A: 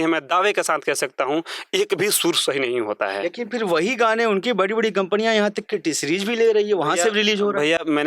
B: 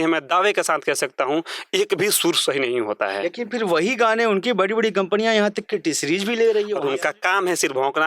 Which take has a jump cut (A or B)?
B